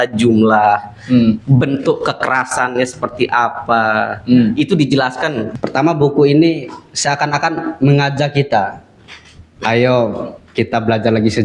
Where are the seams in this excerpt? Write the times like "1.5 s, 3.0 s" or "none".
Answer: 5.4 s